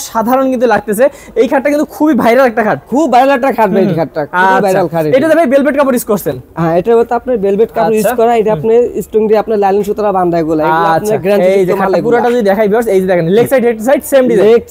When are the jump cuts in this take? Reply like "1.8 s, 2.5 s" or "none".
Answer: none